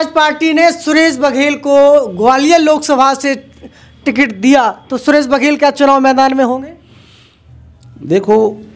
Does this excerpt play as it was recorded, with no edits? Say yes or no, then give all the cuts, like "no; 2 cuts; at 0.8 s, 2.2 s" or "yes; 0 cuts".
yes; 0 cuts